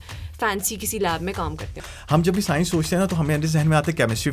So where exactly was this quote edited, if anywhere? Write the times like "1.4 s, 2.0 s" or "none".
1.9 s